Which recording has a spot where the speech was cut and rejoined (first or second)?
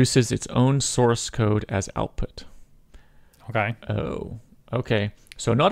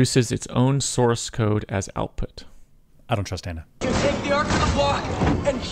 second